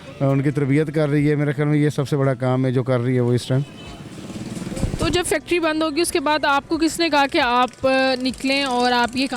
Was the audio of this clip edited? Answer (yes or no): no